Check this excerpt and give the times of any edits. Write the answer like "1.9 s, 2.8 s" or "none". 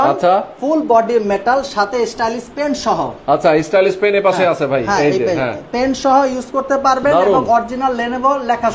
none